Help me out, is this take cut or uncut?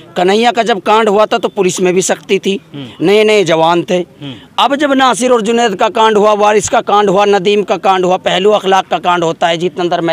uncut